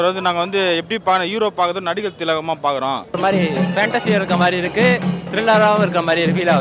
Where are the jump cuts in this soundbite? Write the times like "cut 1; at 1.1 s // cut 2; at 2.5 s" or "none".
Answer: cut 1; at 3.1 s